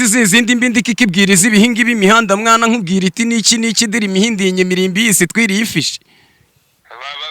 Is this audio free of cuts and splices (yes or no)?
yes